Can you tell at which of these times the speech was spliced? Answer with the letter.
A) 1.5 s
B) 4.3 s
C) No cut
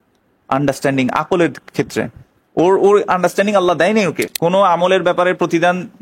B